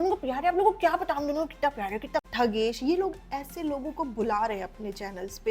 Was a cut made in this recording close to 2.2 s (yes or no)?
yes